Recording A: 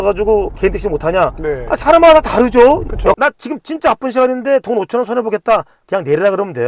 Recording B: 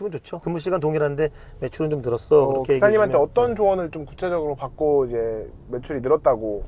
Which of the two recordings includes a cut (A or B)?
A